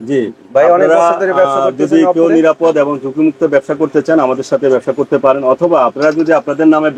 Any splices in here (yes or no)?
no